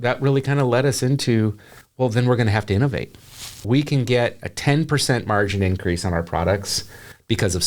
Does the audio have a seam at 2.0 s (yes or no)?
no